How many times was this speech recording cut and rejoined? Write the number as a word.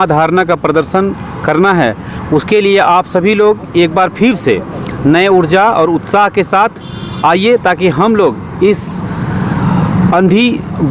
zero